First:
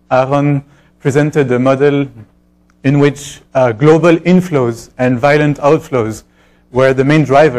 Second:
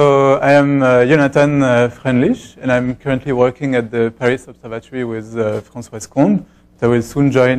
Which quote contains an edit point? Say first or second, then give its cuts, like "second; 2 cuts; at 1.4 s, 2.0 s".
first; 1 cut; at 5.8 s